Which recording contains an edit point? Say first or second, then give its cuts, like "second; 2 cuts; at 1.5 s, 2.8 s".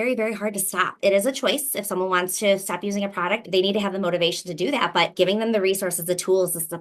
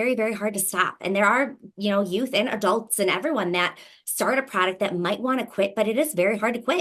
first; 3 cuts; at 0.9 s, 3.4 s, 5.1 s